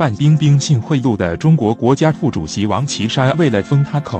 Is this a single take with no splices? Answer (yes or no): yes